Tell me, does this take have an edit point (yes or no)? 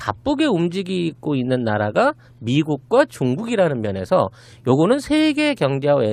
no